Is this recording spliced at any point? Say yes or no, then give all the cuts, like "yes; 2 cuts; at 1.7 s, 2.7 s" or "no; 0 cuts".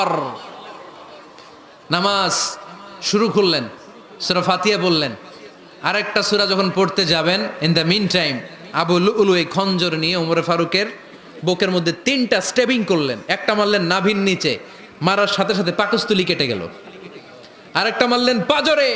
no; 0 cuts